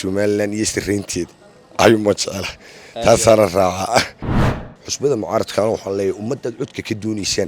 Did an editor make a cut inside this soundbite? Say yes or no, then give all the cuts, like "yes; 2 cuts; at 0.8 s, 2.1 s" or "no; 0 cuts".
yes; 1 cut; at 4.6 s